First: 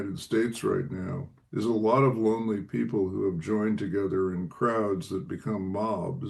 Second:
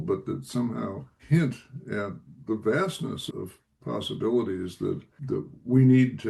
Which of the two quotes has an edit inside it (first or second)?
second